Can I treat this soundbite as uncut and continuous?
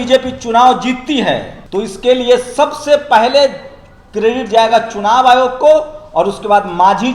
no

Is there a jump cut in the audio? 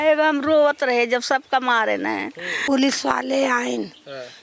yes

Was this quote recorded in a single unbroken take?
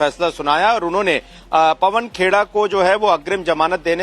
no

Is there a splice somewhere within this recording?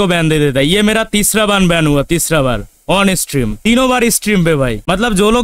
yes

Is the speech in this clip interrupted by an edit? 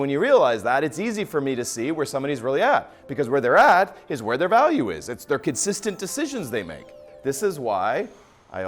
yes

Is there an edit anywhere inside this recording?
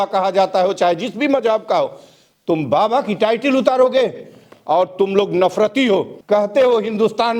yes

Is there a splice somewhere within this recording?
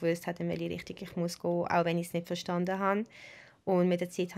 no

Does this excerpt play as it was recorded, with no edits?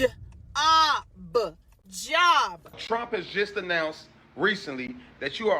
no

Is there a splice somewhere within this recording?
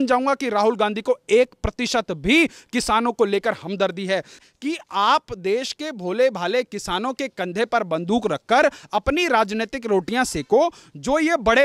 yes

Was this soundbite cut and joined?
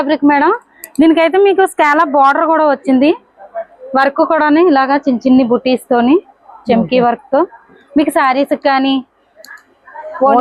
no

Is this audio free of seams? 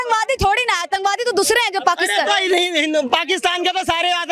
yes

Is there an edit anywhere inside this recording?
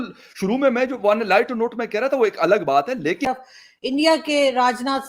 yes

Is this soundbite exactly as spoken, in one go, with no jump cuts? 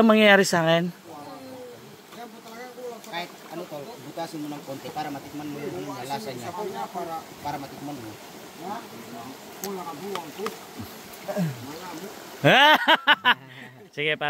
yes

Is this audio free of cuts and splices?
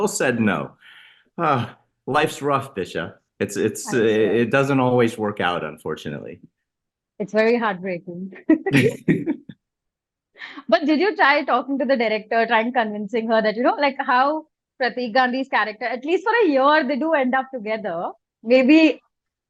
yes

